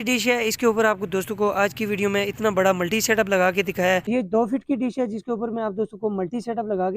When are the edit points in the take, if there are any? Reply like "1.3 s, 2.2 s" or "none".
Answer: 4.1 s